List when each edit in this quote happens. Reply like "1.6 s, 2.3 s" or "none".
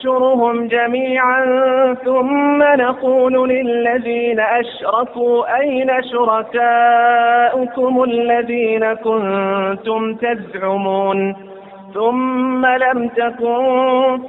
none